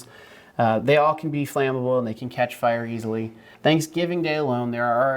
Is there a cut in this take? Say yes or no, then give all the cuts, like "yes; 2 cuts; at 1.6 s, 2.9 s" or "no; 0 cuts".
yes; 1 cut; at 3.5 s